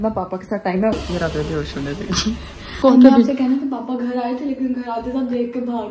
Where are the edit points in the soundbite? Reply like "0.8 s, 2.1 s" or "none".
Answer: 0.9 s, 2.7 s